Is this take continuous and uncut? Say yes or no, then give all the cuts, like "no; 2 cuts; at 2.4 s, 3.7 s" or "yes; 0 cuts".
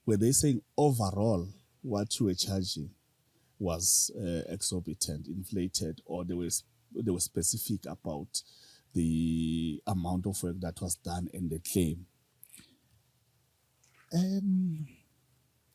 yes; 0 cuts